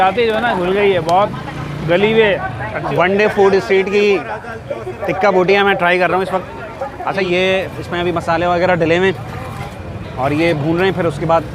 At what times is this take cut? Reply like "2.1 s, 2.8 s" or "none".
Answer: 2.9 s, 7.2 s